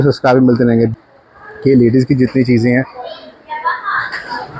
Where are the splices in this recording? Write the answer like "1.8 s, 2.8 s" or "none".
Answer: 0.9 s